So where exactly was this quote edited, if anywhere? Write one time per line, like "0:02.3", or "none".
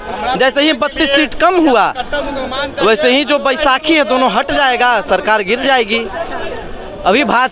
none

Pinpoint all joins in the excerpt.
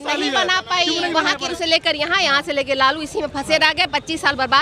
0:01.5

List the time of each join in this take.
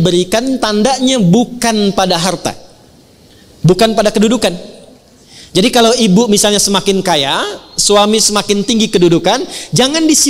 none

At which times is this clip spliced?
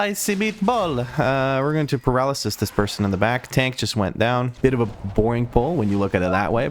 0:04.5

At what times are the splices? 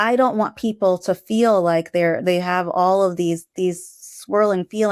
none

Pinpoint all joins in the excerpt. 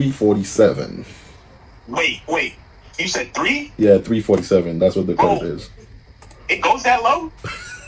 none

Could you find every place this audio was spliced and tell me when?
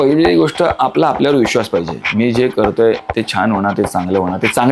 none

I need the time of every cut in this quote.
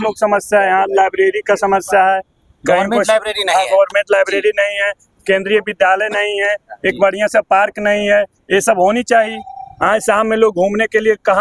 none

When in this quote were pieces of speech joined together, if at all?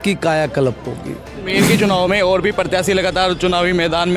0:01.4

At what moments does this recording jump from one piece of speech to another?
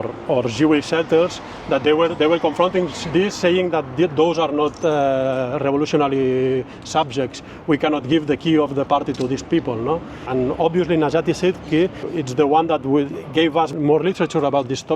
0:10.2
0:12.0
0:13.7

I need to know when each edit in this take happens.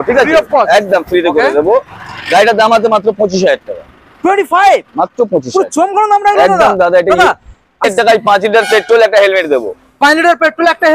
0:07.8

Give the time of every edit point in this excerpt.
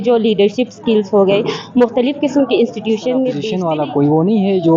0:03.5

